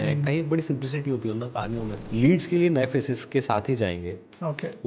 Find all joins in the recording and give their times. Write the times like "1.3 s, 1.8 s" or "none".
2.0 s

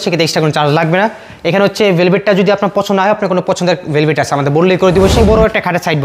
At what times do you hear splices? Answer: 5.1 s

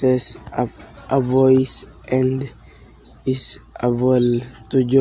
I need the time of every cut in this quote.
1.9 s

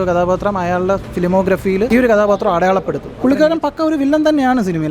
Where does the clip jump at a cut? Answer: 1.9 s, 3.0 s

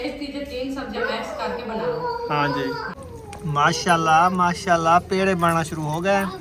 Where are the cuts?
3.0 s

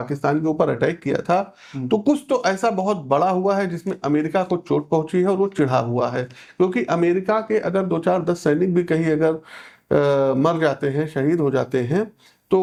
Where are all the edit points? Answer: none

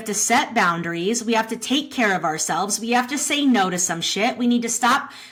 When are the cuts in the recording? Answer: none

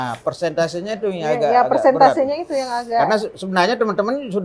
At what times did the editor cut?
none

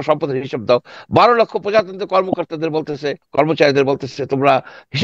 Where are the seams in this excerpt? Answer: 3.2 s

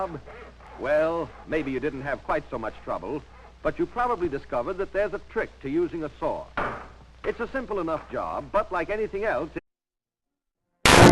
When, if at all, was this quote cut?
none

